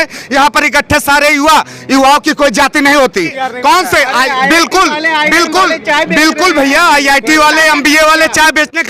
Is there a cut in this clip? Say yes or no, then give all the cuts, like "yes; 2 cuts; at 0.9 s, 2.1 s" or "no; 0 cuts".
yes; 1 cut; at 3.4 s